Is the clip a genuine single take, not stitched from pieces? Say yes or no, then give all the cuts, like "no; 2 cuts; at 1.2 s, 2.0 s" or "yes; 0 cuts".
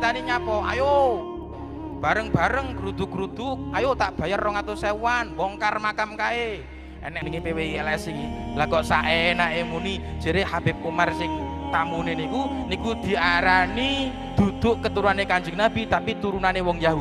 no; 1 cut; at 7.2 s